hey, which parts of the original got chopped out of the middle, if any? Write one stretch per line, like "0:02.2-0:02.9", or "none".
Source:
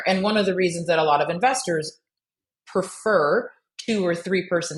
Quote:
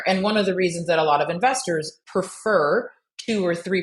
0:02.0-0:02.6